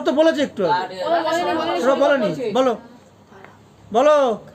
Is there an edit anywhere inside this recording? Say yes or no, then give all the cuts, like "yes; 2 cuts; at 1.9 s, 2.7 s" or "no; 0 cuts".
no; 0 cuts